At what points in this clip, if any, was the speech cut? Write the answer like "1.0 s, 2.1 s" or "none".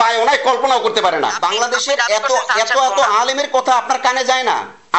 1.3 s